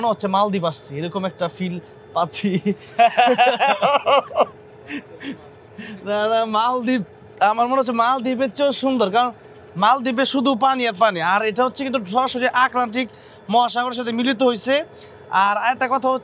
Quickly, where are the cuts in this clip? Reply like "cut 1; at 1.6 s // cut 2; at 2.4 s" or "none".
none

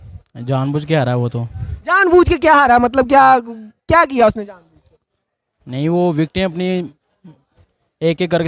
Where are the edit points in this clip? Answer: none

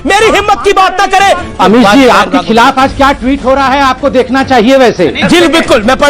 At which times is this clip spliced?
cut 1; at 1.5 s // cut 2; at 5.2 s

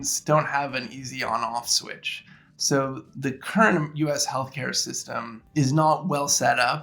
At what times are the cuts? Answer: cut 1; at 3.1 s // cut 2; at 5.4 s

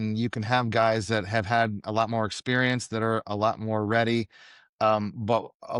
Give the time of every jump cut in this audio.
none

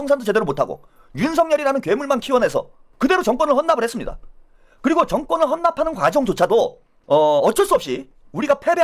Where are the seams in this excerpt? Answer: none

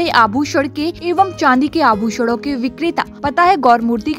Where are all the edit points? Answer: cut 1; at 1.0 s // cut 2; at 3.1 s

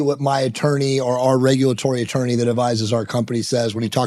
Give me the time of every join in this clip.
none

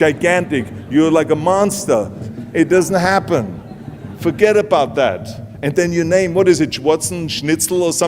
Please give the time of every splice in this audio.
cut 1; at 2.2 s

